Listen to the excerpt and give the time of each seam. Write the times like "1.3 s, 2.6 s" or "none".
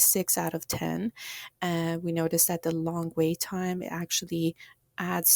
none